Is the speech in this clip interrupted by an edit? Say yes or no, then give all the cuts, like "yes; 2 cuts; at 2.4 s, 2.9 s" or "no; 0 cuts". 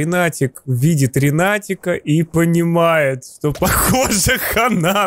no; 0 cuts